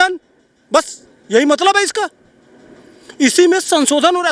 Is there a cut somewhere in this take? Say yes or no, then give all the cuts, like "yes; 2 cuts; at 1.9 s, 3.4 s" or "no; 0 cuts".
no; 0 cuts